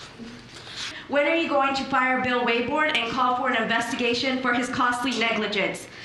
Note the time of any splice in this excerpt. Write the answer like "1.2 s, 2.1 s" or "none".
1.0 s